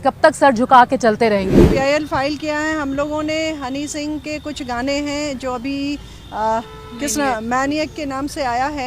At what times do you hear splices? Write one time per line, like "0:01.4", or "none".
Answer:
0:01.7